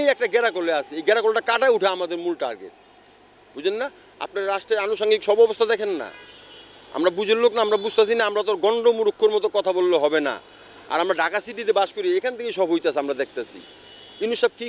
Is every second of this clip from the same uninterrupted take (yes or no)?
yes